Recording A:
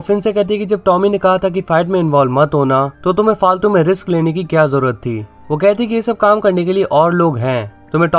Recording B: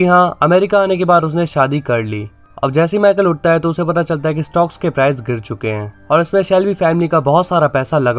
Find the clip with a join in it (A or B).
A